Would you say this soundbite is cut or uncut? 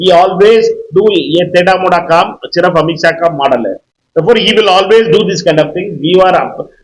uncut